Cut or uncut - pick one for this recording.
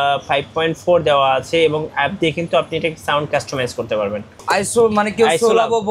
cut